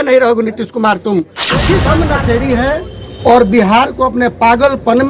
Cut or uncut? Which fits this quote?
cut